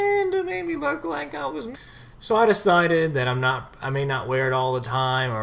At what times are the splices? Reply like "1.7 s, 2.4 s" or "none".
none